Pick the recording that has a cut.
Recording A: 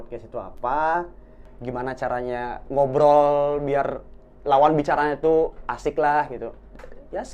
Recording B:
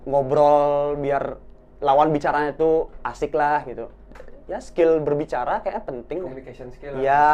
A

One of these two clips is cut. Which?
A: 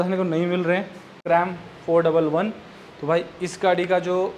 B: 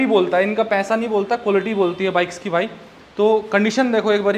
A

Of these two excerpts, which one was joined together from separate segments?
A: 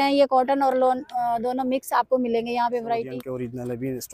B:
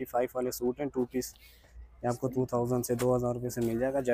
A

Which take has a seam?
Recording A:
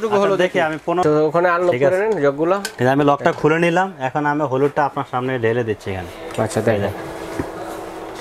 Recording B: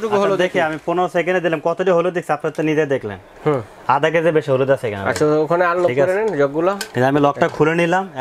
A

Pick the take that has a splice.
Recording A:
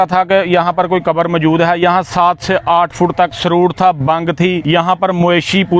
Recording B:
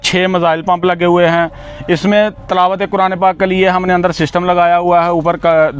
A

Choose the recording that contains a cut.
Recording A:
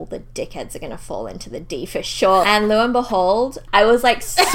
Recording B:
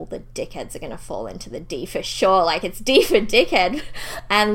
A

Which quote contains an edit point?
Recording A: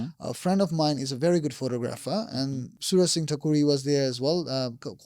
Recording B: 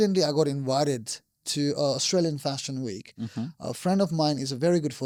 A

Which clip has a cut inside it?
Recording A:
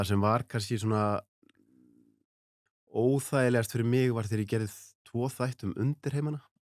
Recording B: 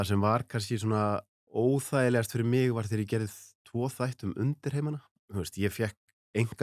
B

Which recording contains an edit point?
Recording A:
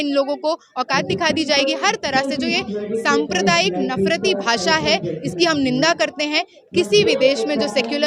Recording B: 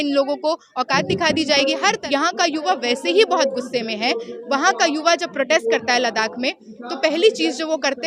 B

